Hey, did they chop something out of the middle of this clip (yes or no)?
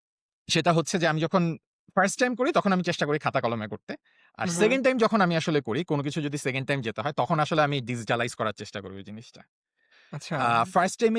no